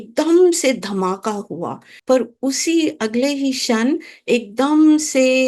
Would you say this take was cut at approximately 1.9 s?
yes; 1 cut; at 1.9 s

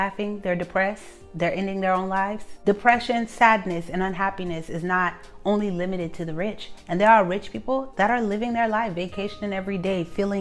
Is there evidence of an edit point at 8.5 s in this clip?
no; 1 cut; at 2.5 s

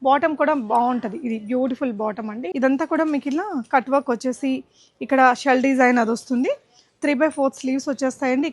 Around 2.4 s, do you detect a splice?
yes; 1 cut; at 2.4 s

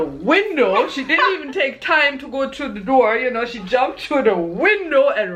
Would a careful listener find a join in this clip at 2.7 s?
no; 0 cuts

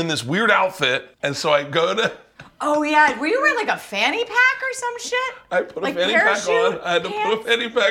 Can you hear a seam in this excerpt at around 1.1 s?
yes; 1 cut; at 1.1 s

